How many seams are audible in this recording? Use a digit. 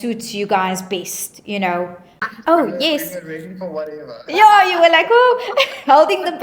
1